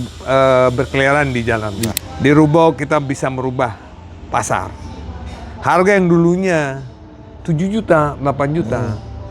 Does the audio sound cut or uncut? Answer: cut